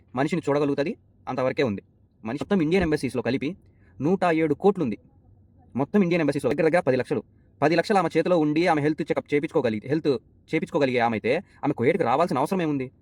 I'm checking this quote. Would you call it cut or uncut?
cut